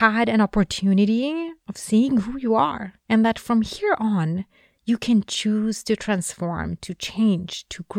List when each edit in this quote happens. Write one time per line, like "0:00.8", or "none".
none